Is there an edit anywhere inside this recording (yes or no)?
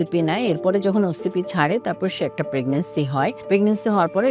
yes